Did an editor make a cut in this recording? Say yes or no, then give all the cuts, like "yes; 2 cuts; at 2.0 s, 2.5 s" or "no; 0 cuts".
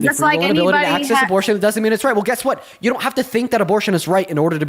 no; 0 cuts